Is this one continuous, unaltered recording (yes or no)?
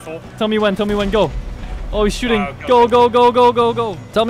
yes